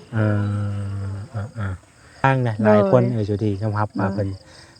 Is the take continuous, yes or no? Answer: no